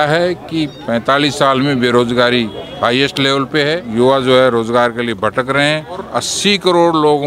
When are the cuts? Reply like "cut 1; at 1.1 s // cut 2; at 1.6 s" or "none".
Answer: cut 1; at 3.9 s // cut 2; at 6.1 s